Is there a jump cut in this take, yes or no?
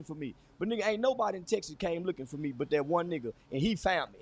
no